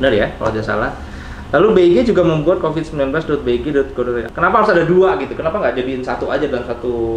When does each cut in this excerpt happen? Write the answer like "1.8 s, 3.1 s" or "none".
4.3 s

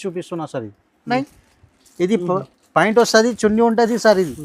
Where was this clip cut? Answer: 1.1 s

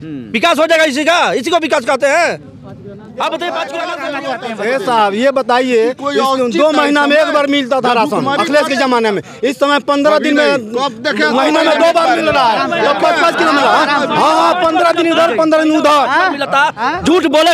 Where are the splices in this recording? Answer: 4.0 s

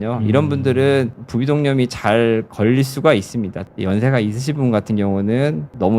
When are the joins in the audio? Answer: 3.6 s

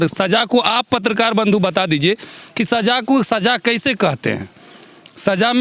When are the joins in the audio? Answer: none

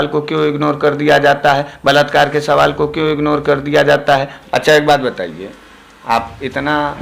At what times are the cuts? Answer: 4.4 s

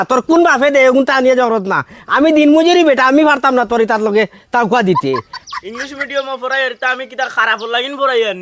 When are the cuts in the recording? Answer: 5.4 s

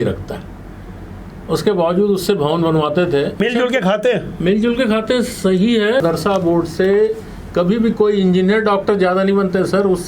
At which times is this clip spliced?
3.4 s, 6.0 s

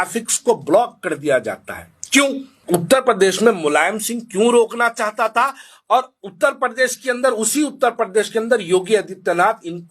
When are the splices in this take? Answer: 2.6 s

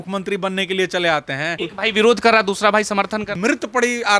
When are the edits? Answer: 1.6 s, 3.3 s

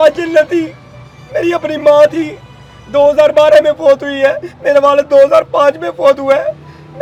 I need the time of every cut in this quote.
none

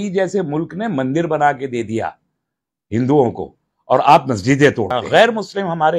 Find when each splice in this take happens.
5.0 s

